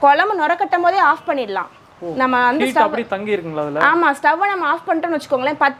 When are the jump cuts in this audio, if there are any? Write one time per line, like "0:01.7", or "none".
none